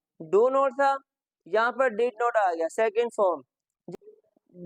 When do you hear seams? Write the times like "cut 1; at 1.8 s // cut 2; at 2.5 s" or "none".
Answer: cut 1; at 3.8 s